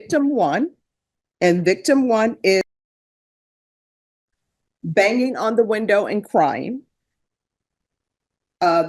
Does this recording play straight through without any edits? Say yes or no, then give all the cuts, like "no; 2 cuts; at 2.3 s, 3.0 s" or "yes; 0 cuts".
yes; 0 cuts